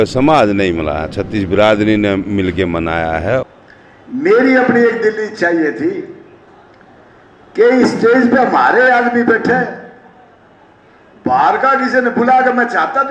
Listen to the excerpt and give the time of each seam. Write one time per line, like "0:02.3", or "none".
0:03.4